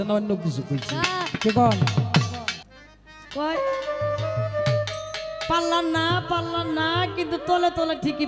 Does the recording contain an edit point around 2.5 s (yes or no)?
yes